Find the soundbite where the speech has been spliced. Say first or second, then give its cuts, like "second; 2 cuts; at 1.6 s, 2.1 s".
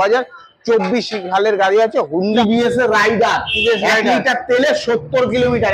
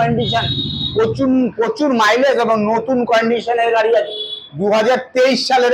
first; 1 cut; at 2.4 s